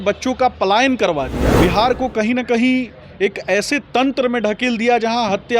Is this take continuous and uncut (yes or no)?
no